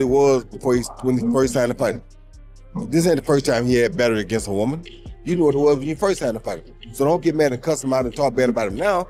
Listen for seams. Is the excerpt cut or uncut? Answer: uncut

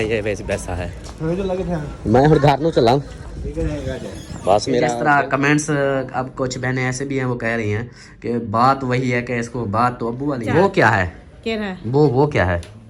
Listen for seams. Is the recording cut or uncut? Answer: cut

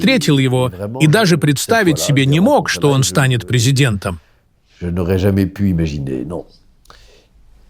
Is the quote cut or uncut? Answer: uncut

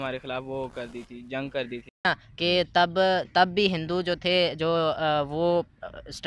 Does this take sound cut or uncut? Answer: cut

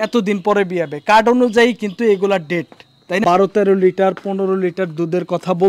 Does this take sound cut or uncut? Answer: cut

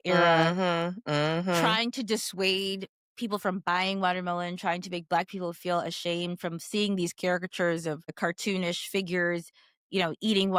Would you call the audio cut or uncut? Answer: uncut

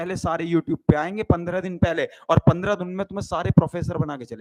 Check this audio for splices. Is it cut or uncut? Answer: uncut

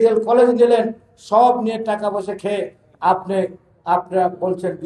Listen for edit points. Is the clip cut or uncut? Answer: uncut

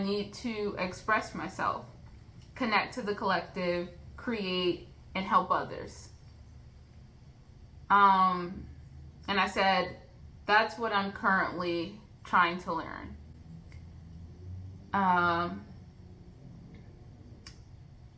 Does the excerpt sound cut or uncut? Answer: uncut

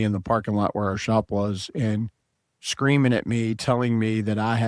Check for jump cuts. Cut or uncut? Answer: uncut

